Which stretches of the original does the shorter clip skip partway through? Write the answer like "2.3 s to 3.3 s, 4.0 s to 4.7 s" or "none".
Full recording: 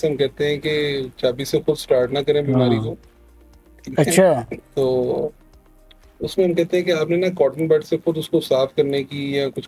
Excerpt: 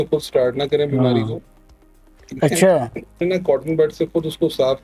4.7 s to 7.1 s